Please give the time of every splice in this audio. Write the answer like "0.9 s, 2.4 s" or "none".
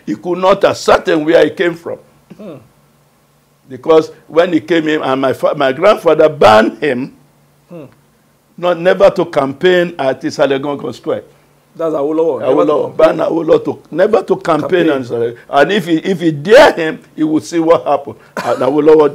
none